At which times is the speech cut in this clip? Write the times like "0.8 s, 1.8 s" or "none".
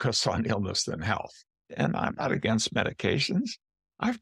1.7 s